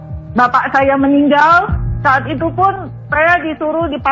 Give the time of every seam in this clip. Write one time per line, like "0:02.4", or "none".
0:01.8